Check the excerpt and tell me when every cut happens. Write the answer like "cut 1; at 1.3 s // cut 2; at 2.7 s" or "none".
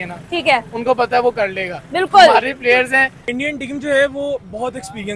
cut 1; at 3.2 s